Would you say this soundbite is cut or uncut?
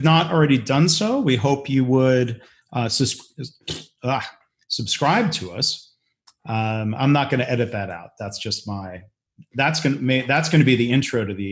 uncut